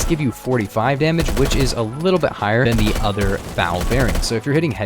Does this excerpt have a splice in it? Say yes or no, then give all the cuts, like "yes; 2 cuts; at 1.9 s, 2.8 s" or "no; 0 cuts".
yes; 1 cut; at 2.6 s